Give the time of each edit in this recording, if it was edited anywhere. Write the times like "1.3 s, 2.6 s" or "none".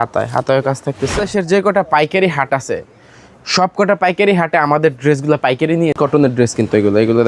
1.2 s, 6.0 s